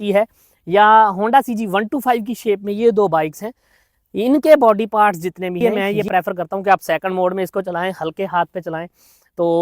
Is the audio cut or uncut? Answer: cut